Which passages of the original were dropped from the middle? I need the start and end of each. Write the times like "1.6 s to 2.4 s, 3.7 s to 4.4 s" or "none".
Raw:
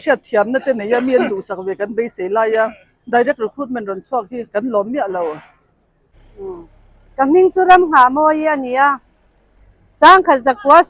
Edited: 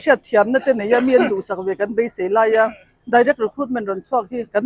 none